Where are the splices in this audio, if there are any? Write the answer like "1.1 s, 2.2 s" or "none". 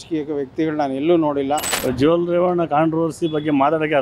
1.7 s